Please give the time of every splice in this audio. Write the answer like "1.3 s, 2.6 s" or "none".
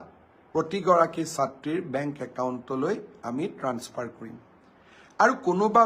none

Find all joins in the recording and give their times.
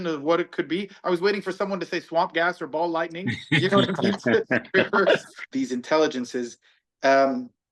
5.4 s

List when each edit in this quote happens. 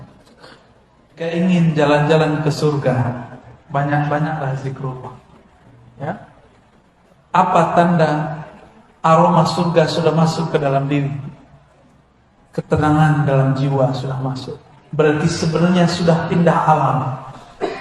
1.3 s

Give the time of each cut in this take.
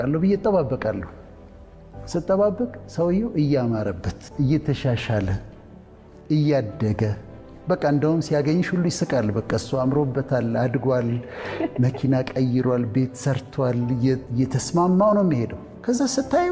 none

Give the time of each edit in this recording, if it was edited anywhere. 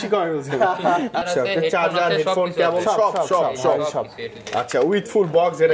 1.2 s

